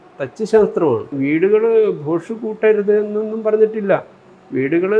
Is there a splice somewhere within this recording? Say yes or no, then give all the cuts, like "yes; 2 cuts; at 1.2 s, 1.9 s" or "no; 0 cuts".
yes; 1 cut; at 1.2 s